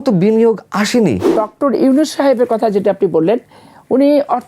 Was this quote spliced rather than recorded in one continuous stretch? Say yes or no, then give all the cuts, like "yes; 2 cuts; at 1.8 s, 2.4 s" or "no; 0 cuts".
yes; 1 cut; at 1.3 s